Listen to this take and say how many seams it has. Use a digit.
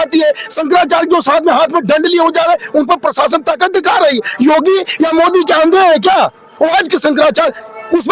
0